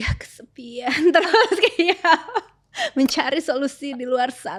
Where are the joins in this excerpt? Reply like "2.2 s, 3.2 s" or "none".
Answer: none